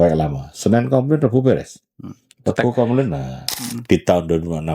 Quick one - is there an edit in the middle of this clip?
yes; 1 cut; at 3.4 s

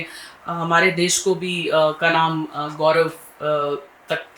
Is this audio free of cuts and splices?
yes; 0 cuts

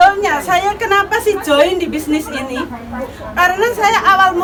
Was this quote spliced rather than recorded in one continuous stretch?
no; 0 cuts

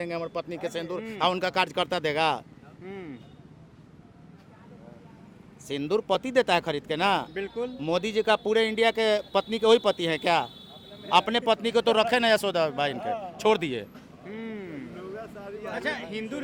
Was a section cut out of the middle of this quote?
no; 0 cuts

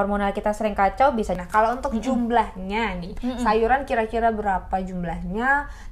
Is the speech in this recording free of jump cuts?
no; 1 cut; at 1.4 s

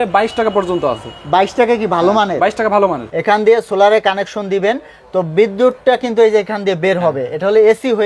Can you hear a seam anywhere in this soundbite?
yes; 1 cut; at 3.0 s

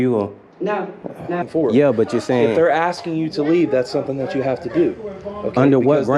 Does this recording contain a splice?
yes; 1 cut; at 1.4 s

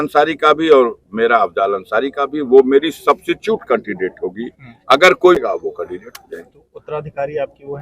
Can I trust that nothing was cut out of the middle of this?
no; 1 cut; at 5.4 s

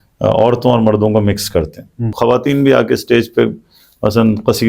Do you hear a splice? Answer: yes; 1 cut; at 2.1 s

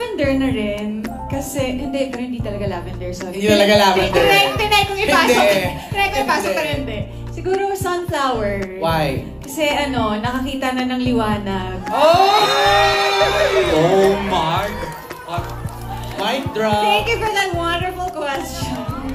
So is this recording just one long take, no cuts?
yes; 0 cuts

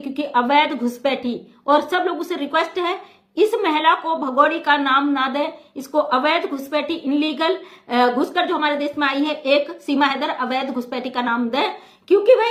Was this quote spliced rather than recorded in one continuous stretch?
no; 0 cuts

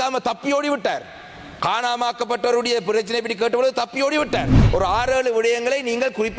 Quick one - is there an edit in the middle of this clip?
yes; 1 cut; at 4.5 s

